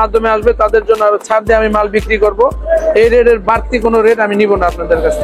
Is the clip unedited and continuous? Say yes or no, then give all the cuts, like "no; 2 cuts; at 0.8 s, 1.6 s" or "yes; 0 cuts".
yes; 0 cuts